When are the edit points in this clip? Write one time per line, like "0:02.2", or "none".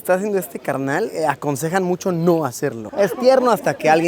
0:02.8